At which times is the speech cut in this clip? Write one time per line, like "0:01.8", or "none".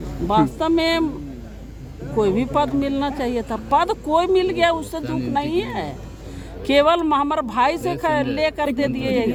none